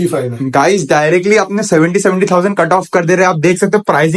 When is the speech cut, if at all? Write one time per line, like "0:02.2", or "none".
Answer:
none